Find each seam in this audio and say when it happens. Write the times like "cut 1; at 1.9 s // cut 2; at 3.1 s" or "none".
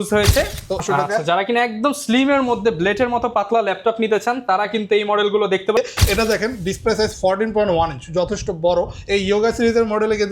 cut 1; at 0.8 s // cut 2; at 5.8 s